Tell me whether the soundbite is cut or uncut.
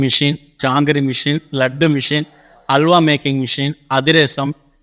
uncut